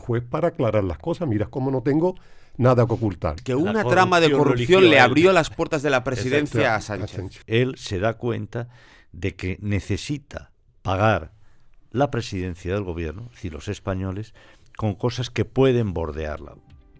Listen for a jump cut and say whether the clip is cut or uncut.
cut